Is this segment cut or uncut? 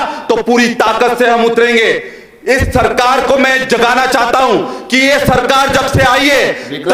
uncut